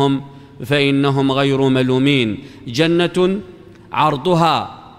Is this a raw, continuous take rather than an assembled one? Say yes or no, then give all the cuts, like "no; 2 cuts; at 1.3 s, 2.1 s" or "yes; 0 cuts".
yes; 0 cuts